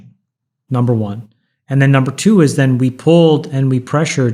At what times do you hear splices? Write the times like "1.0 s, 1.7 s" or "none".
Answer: none